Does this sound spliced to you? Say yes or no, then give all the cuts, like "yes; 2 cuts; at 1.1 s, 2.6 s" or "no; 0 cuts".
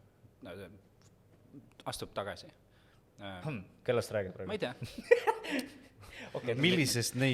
no; 0 cuts